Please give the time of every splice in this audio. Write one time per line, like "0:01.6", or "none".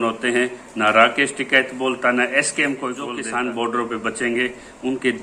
0:03.1